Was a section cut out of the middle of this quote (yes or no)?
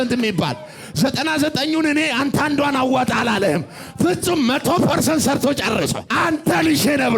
yes